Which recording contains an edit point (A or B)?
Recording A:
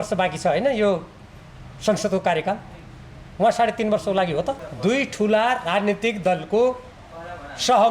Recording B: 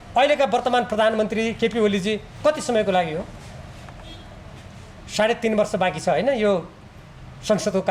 A